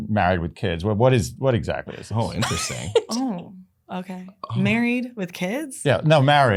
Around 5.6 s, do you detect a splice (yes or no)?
no